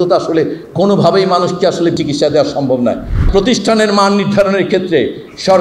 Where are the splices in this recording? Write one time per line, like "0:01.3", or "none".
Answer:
0:02.0
0:03.3